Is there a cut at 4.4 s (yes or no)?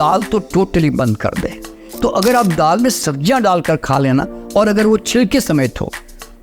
no